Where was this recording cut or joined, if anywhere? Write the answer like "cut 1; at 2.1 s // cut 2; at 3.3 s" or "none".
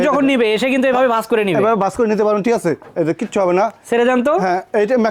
none